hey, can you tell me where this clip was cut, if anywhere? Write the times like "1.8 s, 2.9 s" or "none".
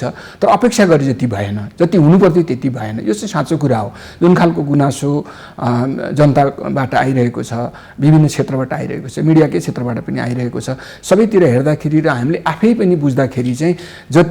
none